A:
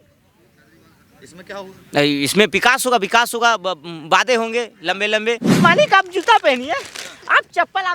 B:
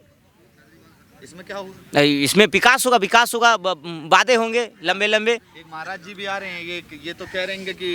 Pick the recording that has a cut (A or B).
A